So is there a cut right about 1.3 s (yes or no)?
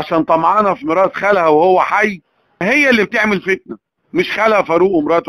no